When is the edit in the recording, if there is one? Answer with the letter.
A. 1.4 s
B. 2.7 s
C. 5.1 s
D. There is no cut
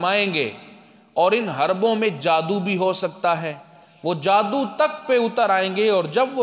D